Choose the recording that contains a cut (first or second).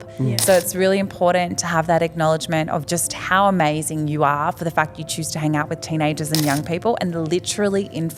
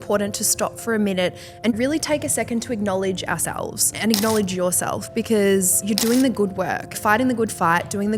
second